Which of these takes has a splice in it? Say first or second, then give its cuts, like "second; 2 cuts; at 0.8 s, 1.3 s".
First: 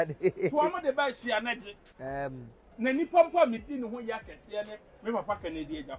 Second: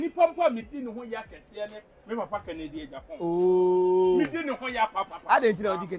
first; 1 cut; at 1.8 s